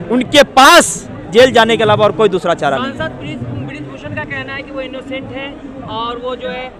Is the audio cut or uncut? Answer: uncut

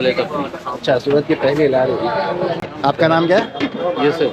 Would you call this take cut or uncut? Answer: cut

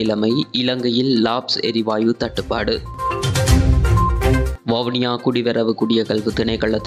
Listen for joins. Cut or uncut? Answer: uncut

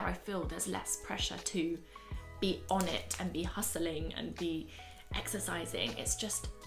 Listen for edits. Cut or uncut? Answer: uncut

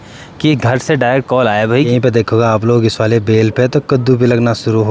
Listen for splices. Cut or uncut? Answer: cut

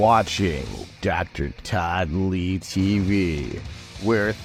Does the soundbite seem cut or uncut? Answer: uncut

